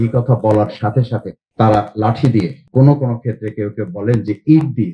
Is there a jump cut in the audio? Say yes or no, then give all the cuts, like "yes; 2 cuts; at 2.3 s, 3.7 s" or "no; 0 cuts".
yes; 2 cuts; at 1.4 s, 2.6 s